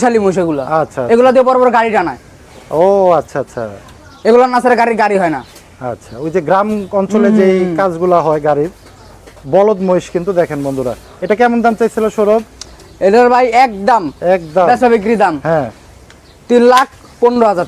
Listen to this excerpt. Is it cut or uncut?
uncut